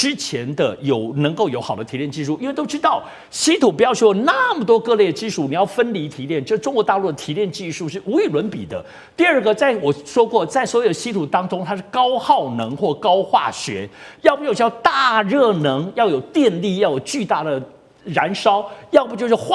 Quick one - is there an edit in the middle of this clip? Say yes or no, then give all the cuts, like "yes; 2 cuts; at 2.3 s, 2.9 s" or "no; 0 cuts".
no; 0 cuts